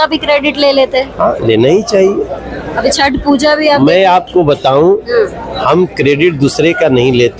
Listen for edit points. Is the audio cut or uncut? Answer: uncut